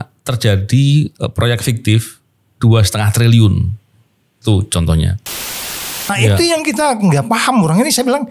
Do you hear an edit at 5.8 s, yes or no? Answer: yes